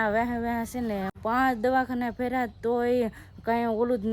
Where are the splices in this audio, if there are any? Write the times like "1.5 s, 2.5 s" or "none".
1.1 s